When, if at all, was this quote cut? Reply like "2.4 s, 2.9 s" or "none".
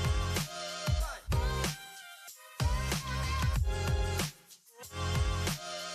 3.8 s

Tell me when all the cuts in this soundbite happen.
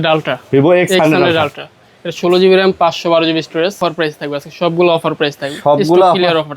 3.8 s

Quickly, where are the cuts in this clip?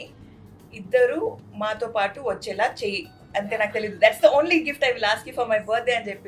none

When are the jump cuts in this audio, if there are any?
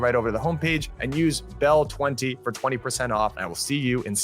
1.0 s, 3.3 s

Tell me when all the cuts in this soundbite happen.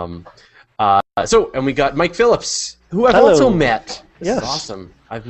1.7 s

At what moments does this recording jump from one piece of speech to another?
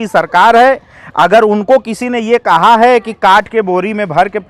none

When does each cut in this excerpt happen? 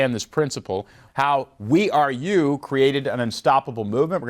1.0 s

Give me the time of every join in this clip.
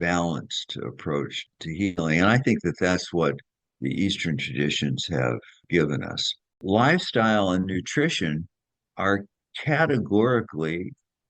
6.6 s

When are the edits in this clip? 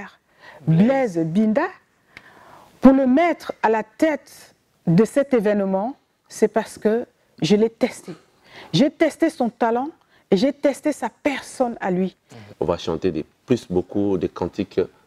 12.4 s

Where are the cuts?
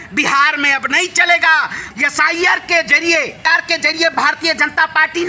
1.8 s

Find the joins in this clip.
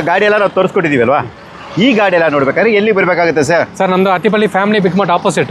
none

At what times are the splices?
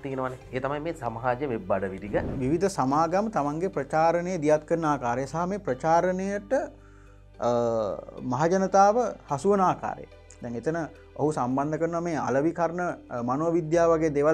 2.3 s

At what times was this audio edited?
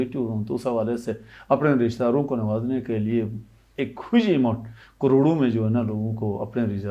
none

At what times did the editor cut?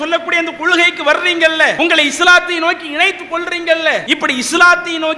1.8 s, 4.0 s

